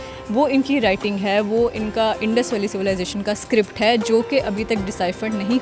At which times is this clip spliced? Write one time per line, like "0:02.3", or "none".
none